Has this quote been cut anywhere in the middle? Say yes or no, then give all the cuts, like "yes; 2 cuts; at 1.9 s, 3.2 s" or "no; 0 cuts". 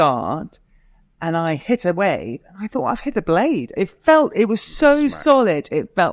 no; 0 cuts